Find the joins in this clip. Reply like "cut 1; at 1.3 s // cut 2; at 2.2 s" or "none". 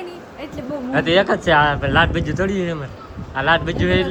none